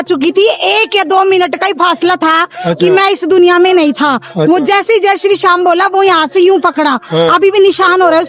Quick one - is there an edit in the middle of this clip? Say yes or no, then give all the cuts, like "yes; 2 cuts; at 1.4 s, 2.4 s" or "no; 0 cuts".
no; 0 cuts